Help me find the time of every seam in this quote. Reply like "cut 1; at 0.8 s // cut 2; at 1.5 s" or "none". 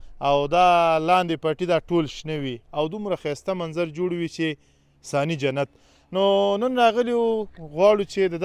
none